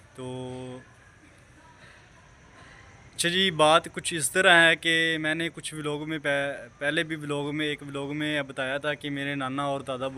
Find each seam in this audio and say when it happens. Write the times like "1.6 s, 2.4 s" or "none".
none